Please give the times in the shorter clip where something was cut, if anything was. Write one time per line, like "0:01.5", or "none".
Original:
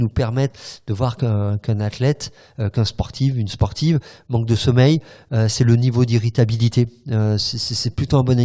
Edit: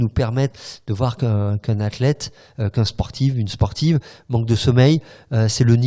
none